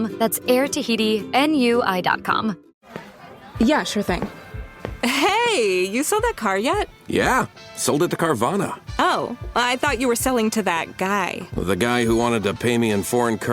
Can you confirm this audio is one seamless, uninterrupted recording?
no; 1 cut; at 2.7 s

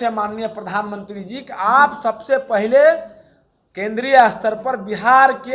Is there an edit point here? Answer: no; 0 cuts

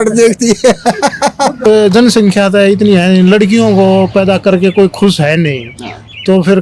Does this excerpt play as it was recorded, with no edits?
no; 1 cut; at 1.6 s

